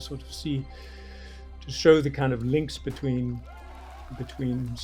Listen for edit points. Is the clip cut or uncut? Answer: uncut